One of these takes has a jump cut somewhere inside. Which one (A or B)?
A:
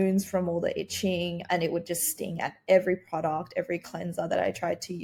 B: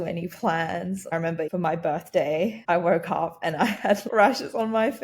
B